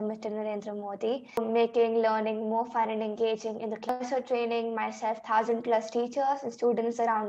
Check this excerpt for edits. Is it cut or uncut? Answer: cut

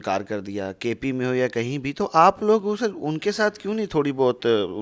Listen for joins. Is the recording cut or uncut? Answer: uncut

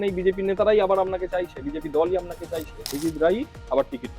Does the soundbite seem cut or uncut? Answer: cut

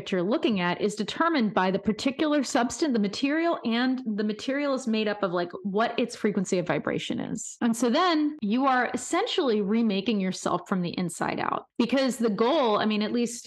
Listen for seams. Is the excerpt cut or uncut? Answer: cut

